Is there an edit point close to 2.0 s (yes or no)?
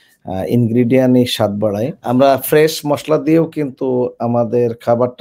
yes